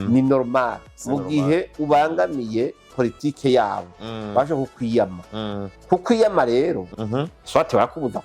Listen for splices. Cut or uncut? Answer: cut